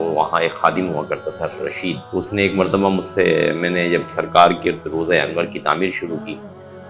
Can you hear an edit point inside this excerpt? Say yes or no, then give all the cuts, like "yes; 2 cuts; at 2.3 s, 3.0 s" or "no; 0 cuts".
yes; 1 cut; at 2.0 s